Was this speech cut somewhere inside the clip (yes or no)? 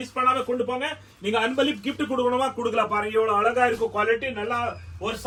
no